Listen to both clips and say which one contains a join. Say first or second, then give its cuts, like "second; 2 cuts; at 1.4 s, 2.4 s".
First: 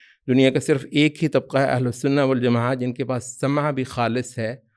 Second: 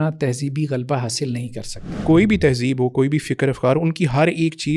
second; 1 cut; at 1.9 s